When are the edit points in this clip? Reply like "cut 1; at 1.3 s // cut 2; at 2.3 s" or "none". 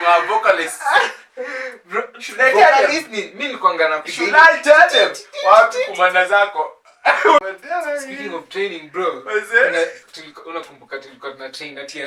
cut 1; at 7.4 s